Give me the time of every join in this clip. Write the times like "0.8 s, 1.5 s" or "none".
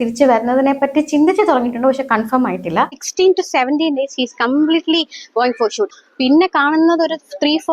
3.1 s, 6.0 s